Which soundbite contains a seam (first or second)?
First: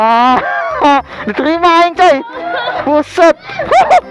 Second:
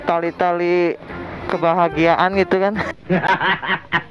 second